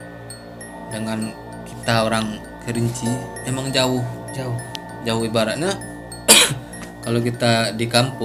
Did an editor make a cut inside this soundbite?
no; 0 cuts

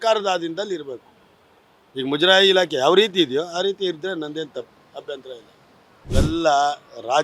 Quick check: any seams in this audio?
yes; 1 cut; at 6.0 s

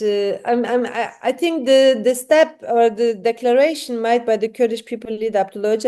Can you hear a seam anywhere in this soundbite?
no; 0 cuts

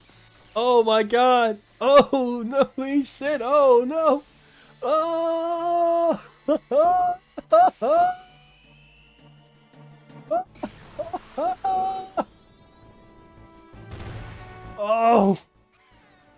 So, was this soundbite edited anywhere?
no; 0 cuts

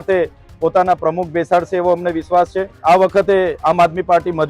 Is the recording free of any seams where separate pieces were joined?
no; 1 cut; at 2.7 s

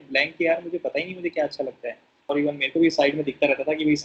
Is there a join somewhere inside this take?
yes; 1 cut; at 2.3 s

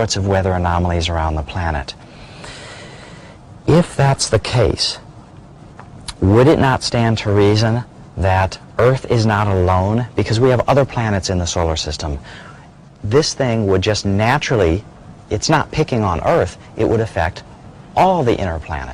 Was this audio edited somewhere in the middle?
yes; 1 cut; at 6.2 s

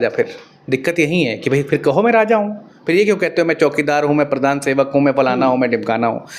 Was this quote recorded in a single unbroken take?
yes; 0 cuts

